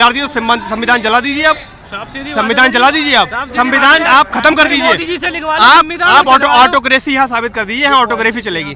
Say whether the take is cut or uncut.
uncut